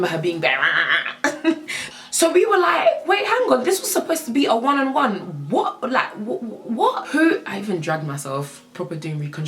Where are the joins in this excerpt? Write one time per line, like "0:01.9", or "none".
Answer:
0:01.8
0:07.0